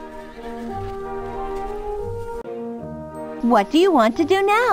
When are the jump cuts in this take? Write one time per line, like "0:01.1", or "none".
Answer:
0:02.8